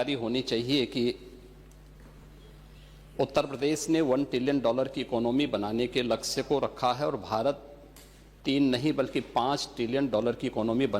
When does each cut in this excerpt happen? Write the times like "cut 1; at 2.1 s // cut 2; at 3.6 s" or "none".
none